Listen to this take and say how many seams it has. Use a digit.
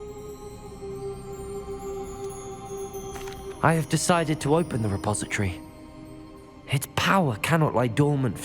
1